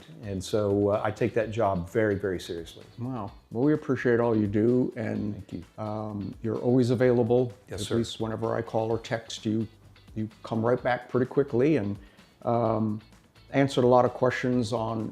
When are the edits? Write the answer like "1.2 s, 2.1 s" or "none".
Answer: none